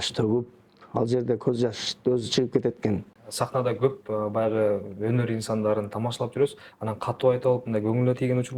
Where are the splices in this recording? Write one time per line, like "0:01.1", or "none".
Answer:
0:03.2